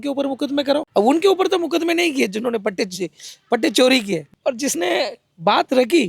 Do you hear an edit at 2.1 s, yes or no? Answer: no